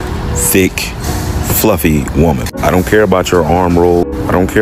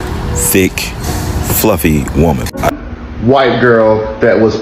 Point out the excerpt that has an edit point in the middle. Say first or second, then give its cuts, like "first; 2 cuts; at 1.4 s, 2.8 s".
second; 1 cut; at 2.7 s